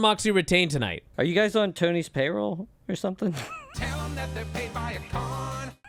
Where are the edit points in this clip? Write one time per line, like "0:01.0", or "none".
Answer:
none

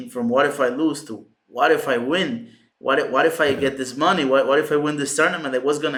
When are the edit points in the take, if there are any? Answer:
none

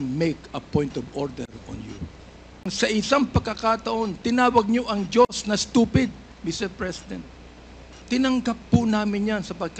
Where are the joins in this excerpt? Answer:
0:02.7

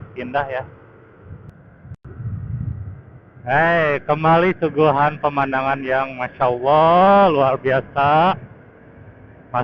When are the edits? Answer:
0:01.3

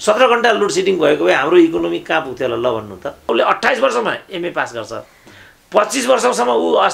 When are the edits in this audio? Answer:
0:03.3

